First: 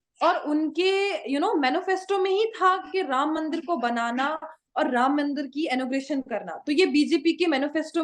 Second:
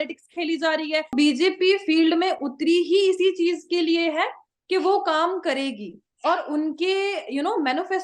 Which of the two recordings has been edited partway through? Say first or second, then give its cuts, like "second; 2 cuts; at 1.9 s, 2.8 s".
second; 1 cut; at 1.1 s